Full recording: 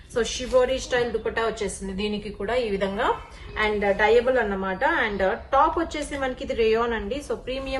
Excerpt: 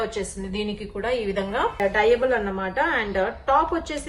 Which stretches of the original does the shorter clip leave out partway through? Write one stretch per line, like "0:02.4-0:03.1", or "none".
0:03.2-0:03.8